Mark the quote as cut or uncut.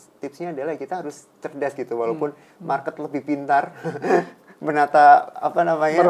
uncut